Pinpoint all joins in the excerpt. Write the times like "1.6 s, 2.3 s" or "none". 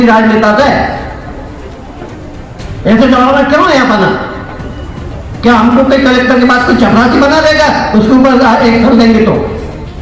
none